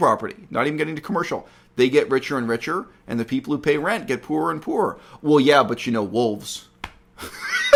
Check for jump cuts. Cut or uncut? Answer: uncut